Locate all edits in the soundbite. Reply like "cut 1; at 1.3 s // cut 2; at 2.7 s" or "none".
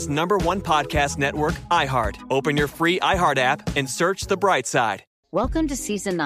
cut 1; at 5.1 s